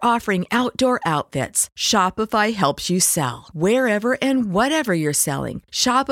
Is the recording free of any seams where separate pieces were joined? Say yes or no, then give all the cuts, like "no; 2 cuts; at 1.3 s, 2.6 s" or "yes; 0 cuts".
yes; 0 cuts